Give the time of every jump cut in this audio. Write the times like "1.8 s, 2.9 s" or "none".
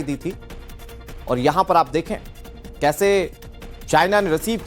1.9 s